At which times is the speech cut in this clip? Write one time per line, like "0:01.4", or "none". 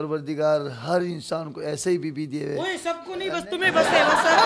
none